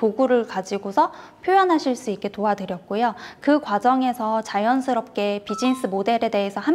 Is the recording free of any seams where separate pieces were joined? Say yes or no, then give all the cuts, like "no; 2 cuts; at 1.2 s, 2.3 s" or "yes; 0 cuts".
yes; 0 cuts